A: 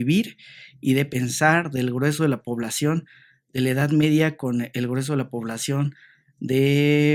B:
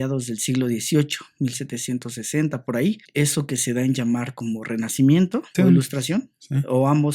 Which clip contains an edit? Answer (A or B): B